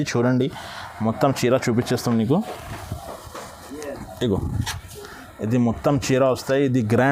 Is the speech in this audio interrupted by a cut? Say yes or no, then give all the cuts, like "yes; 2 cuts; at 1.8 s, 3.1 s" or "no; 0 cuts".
no; 0 cuts